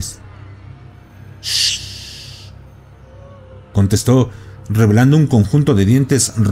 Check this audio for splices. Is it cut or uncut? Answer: uncut